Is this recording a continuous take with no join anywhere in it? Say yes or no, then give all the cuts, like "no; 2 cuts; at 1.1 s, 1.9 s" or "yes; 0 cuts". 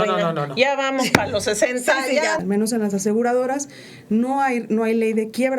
no; 1 cut; at 2.4 s